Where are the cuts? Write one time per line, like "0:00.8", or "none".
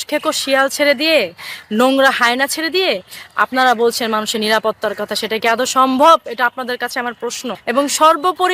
0:07.5